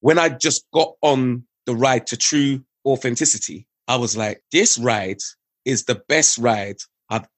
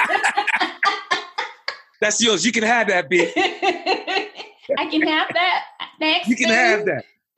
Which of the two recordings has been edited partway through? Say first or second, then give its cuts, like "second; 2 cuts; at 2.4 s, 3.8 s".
first; 2 cuts; at 1.5 s, 2.7 s